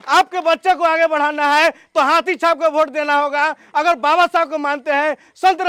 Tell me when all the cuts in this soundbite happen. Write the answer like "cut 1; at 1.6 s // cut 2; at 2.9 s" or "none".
none